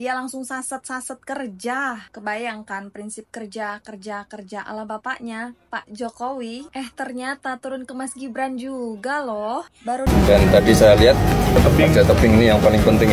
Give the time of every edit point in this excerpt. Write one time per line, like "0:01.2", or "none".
0:10.1